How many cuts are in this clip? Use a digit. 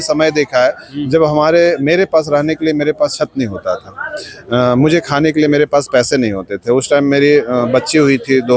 0